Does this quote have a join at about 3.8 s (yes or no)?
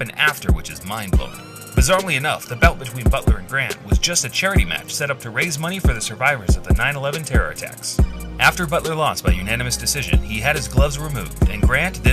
no